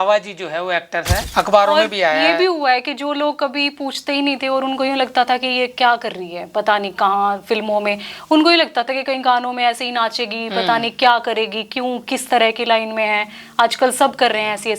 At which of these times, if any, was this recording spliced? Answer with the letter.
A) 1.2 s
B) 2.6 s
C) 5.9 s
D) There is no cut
A